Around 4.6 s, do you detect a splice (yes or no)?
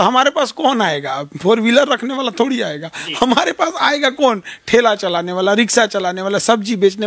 no